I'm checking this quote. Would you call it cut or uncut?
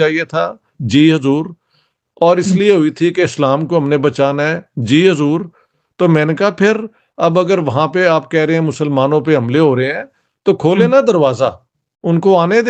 uncut